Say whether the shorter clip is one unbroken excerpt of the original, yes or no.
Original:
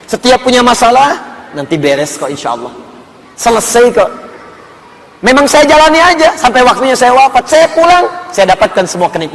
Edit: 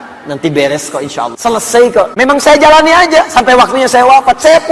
no